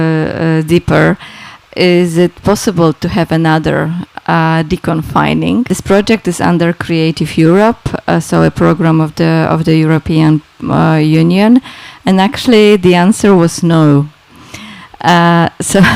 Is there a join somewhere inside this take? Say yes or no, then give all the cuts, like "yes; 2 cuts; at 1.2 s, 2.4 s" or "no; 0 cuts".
yes; 1 cut; at 5.8 s